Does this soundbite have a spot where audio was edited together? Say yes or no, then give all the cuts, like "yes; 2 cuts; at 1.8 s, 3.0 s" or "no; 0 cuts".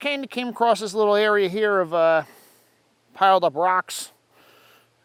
no; 0 cuts